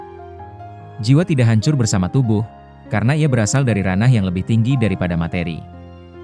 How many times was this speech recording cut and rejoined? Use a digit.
1